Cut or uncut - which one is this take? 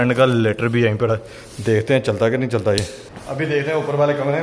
cut